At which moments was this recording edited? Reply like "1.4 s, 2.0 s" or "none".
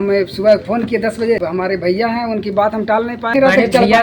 1.4 s, 3.4 s